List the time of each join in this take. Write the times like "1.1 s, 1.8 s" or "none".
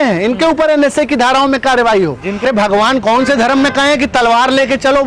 2.4 s

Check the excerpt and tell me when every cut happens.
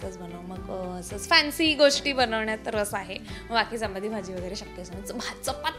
none

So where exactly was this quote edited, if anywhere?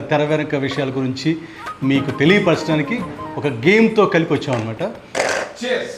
5.0 s

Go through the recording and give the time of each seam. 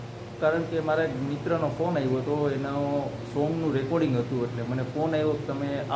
none

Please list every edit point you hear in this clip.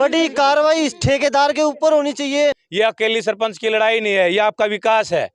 2.6 s

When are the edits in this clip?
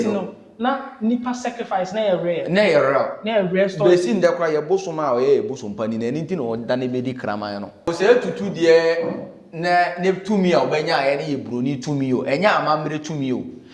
7.9 s

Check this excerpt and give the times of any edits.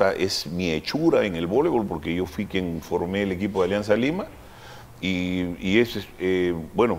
none

